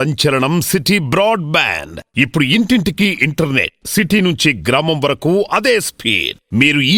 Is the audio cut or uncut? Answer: uncut